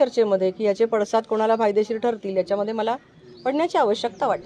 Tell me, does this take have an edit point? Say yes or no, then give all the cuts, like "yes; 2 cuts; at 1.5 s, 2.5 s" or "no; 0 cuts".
no; 0 cuts